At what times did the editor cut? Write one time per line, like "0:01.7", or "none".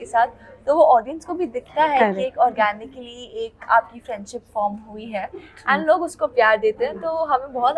none